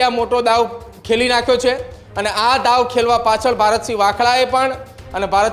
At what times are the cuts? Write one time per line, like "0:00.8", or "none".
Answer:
none